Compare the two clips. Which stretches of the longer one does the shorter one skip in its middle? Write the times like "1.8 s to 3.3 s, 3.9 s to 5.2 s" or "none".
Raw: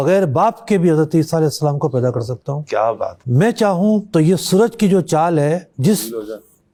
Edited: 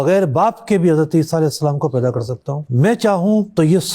2.6 s to 3.2 s